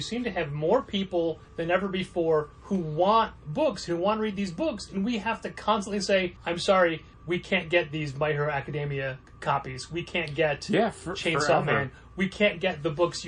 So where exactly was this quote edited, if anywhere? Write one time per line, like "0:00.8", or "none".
0:01.5
0:02.6
0:06.4
0:07.1
0:09.3